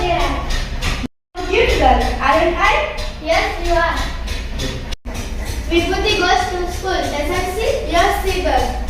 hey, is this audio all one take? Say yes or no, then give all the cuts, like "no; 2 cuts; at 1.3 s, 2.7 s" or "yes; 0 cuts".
yes; 0 cuts